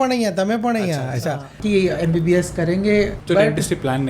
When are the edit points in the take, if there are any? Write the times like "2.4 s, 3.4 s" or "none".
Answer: 1.6 s, 3.2 s